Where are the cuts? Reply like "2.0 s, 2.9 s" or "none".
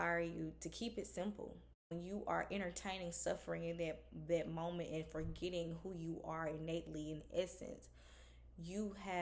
2.0 s

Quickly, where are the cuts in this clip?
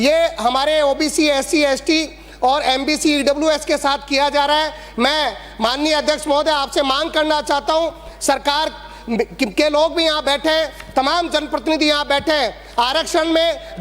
none

